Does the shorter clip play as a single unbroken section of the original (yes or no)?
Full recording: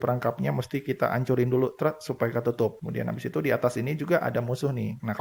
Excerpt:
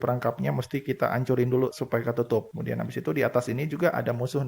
no